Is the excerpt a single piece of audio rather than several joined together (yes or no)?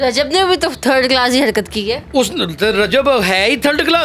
yes